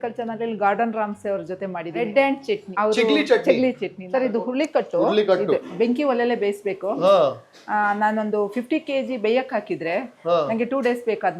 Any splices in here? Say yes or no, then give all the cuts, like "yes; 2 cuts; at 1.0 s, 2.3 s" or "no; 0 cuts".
yes; 3 cuts; at 2.7 s, 3.9 s, 5.6 s